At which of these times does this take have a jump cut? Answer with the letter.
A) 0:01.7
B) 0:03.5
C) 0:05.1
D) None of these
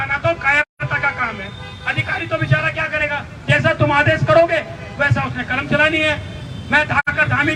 D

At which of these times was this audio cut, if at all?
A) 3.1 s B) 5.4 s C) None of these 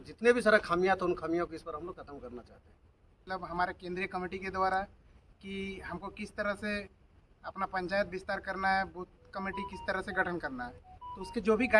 A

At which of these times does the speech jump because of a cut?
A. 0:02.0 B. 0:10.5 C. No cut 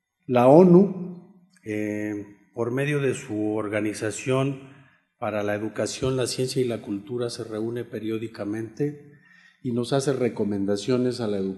A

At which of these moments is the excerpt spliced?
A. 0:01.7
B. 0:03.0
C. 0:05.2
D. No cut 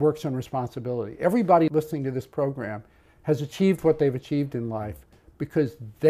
A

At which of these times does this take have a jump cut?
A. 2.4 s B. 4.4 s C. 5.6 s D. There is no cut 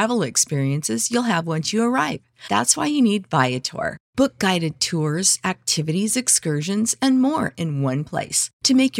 D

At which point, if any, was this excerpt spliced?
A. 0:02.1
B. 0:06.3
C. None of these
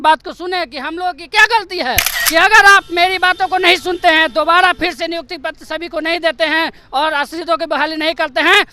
A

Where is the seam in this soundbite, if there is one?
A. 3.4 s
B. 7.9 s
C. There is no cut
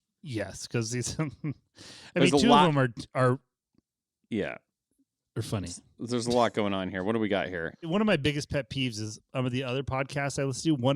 B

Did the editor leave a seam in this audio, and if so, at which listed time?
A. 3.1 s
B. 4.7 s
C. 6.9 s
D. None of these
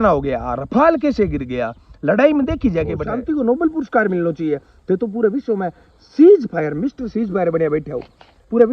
A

